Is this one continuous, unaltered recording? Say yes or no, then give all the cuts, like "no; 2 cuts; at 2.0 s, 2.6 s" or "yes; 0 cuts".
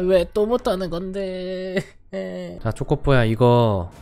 yes; 0 cuts